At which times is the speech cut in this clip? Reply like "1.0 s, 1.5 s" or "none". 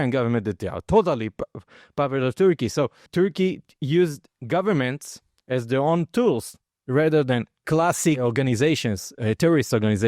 3.0 s, 4.3 s